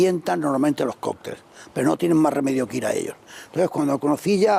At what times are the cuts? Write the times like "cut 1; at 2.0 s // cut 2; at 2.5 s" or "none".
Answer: cut 1; at 2.0 s

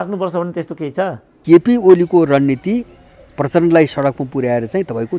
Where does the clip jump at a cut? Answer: cut 1; at 1.4 s

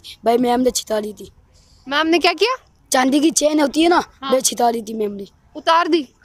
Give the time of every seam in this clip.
none

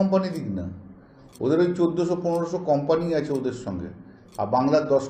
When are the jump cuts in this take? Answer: none

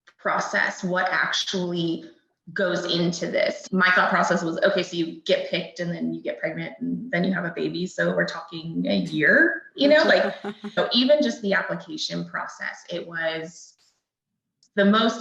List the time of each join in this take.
cut 1; at 3.6 s // cut 2; at 10.8 s

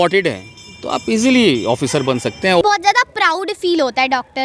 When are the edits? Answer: cut 1; at 2.6 s

